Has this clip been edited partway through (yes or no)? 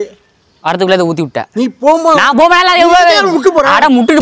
no